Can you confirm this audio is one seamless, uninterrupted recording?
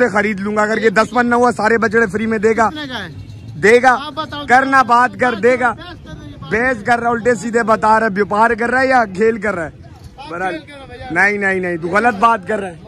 yes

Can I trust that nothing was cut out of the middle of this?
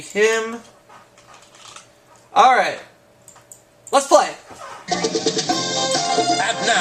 yes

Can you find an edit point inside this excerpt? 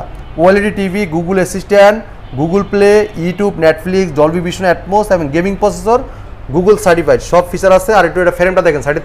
no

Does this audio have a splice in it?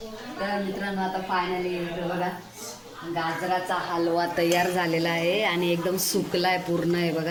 no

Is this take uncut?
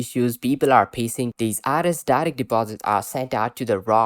no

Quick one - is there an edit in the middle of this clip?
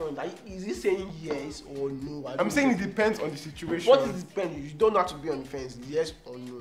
no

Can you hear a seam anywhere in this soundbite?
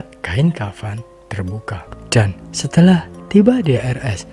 yes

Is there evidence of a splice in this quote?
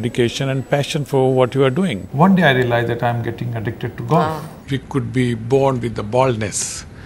yes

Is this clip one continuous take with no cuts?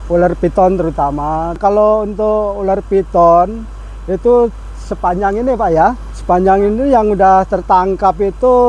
no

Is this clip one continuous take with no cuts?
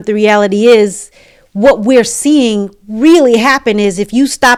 yes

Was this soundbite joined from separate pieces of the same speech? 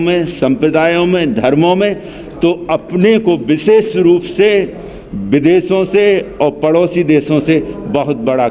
no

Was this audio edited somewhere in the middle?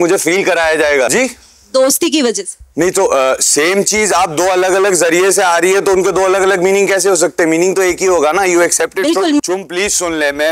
yes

